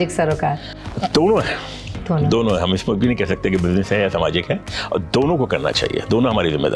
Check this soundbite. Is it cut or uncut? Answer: uncut